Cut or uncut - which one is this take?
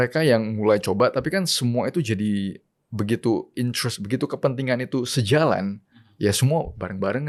uncut